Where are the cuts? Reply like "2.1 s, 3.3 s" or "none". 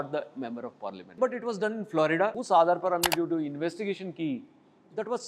1.1 s, 2.4 s